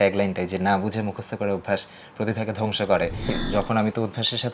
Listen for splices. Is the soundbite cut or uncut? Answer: cut